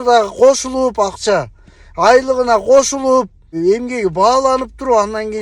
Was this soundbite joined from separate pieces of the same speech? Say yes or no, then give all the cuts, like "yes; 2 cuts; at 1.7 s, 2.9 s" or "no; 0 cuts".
yes; 1 cut; at 3.5 s